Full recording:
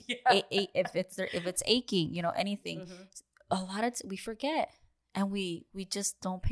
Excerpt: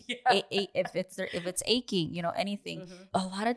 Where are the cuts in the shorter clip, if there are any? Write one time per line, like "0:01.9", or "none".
0:02.7